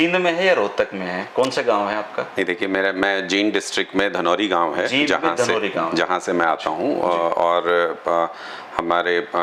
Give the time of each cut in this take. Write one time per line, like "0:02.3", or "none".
none